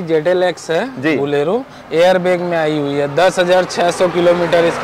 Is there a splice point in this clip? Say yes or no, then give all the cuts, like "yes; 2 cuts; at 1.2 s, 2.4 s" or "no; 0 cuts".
no; 0 cuts